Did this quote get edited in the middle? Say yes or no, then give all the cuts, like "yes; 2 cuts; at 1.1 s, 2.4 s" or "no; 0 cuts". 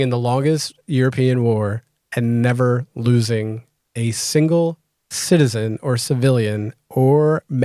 no; 0 cuts